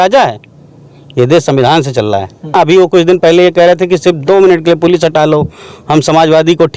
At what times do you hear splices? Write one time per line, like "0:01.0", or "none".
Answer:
0:02.6